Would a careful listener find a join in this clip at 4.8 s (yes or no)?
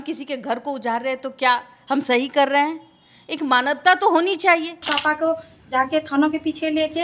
yes